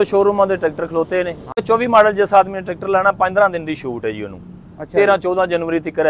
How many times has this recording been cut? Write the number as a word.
one